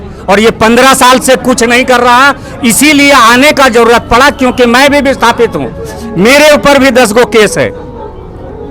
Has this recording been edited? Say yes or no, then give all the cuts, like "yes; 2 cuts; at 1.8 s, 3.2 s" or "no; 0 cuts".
no; 0 cuts